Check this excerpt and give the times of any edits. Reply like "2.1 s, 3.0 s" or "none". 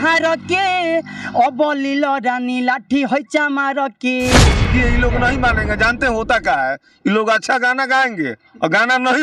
4.7 s